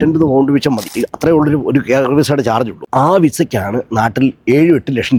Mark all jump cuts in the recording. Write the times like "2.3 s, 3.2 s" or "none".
none

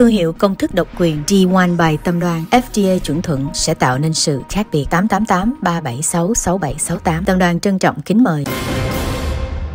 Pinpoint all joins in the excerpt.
8.5 s

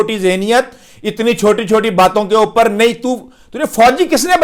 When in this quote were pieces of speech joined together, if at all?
none

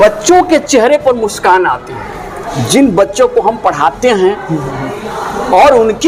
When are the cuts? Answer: none

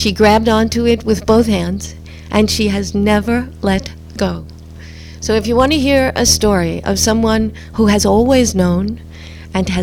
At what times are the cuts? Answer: none

